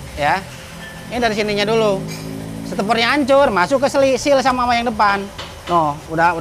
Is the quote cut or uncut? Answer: uncut